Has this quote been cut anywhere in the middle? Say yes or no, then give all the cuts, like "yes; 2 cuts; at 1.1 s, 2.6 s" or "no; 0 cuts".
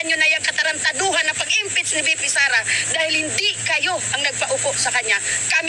no; 0 cuts